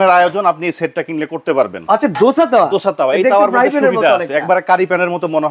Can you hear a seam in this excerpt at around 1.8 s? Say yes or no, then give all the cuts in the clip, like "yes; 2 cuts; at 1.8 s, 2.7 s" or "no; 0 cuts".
yes; 1 cut; at 1.8 s